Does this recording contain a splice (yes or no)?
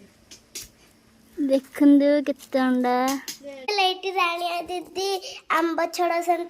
yes